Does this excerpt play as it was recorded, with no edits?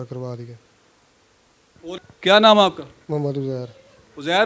no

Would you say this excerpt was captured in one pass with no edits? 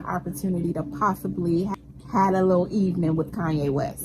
no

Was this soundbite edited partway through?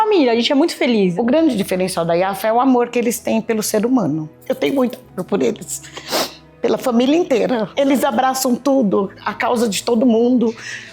yes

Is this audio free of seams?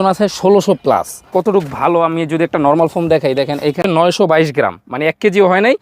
no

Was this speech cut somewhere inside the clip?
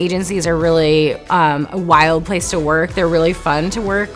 no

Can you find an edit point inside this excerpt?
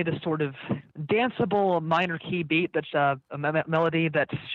yes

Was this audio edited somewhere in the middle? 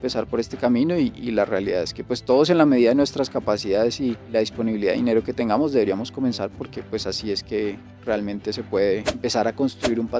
yes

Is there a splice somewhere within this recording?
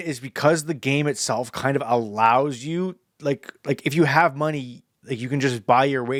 no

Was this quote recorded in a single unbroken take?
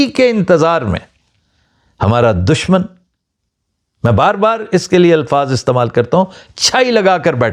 yes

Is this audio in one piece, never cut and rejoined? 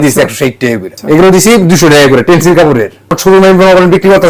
no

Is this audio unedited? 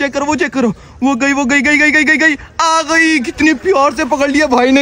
yes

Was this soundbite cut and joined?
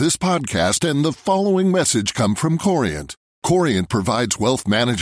no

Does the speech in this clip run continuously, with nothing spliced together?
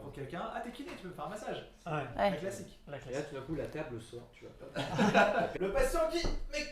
no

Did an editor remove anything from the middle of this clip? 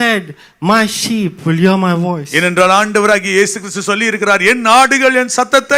no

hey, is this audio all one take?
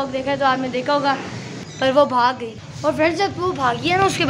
no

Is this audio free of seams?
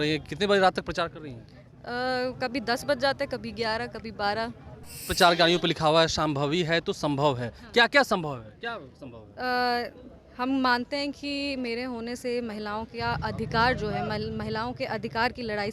no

